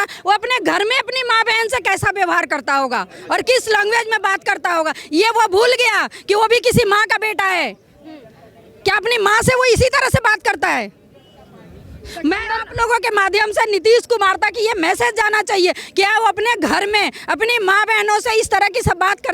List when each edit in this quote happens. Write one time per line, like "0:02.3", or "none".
none